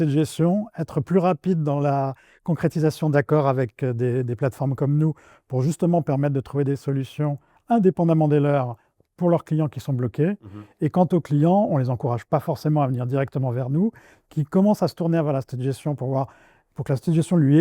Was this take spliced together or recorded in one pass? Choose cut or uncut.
uncut